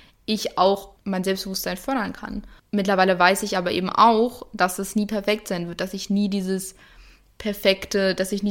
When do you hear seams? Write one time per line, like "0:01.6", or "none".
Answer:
0:00.9
0:02.5